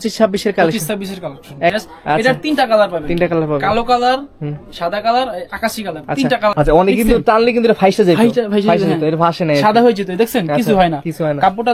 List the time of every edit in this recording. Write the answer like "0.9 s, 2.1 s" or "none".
1.8 s, 6.5 s